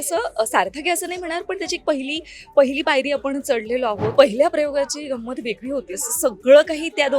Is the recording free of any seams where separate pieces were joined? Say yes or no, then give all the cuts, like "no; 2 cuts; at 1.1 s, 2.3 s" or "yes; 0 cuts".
no; 1 cut; at 4.1 s